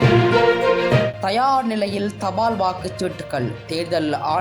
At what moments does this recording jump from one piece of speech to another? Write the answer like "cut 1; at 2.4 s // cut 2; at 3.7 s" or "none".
cut 1; at 1.1 s